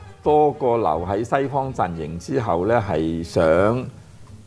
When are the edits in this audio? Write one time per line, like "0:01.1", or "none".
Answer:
none